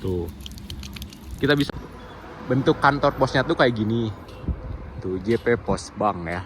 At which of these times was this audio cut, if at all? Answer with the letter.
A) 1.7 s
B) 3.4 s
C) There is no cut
A